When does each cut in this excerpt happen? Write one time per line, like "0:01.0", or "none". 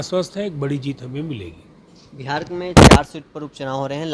none